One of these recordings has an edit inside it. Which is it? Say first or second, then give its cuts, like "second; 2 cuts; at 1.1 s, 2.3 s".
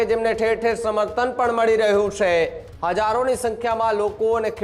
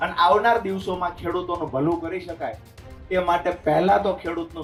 first; 1 cut; at 2.7 s